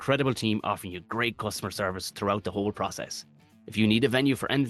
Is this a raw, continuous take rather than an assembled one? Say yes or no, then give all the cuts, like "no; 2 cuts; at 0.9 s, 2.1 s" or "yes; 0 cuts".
yes; 0 cuts